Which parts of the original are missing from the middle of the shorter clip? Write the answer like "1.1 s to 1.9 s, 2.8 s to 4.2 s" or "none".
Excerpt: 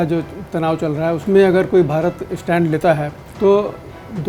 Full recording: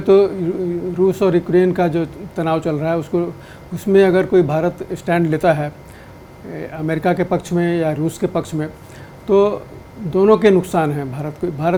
3.0 s to 3.8 s, 5.8 s to 9.1 s